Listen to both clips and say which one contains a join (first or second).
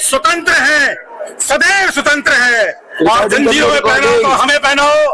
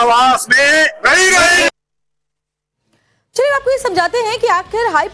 first